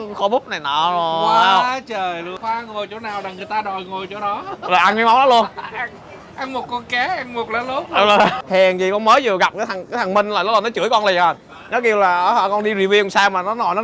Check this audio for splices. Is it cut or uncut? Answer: cut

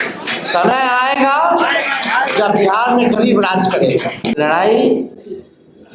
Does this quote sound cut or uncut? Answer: cut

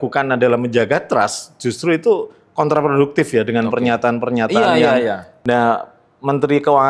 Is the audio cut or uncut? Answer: cut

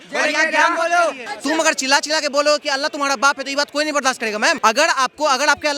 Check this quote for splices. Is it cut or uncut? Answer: cut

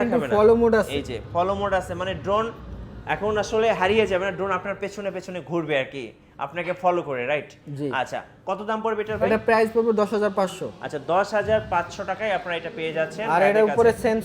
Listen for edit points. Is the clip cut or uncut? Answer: uncut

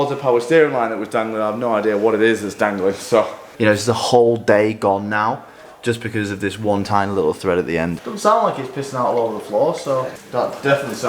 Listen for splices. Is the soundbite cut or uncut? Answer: cut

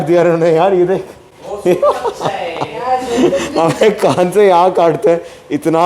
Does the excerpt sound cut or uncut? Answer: uncut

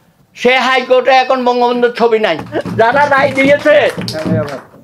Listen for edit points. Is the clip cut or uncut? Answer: cut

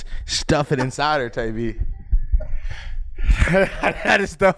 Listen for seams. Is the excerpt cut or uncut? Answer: uncut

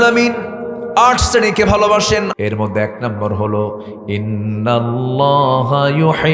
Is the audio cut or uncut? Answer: cut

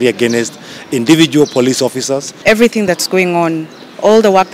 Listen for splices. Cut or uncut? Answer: cut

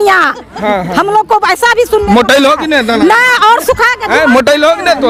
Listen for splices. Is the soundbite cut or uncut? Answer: uncut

